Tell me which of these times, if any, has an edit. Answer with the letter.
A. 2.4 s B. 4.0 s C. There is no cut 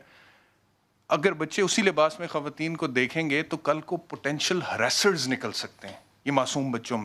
C